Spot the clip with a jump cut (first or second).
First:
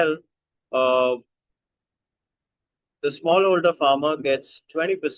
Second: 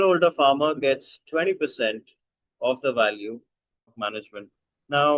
second